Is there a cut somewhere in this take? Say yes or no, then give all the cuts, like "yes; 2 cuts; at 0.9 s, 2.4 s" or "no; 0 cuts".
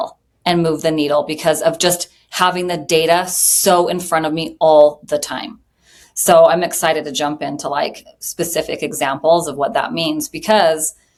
no; 0 cuts